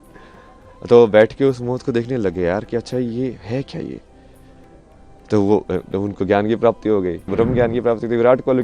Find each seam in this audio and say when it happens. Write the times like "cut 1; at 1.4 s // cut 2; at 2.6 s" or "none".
cut 1; at 7.2 s